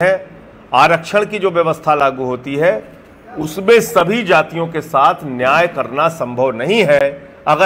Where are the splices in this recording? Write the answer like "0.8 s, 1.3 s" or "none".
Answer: none